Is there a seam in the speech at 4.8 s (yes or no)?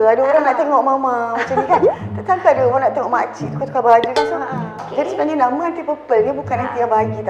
yes